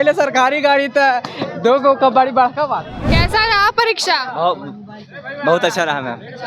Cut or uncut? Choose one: cut